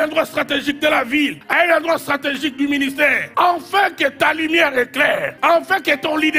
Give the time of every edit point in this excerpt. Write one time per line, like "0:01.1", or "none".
0:01.4
0:03.2
0:05.3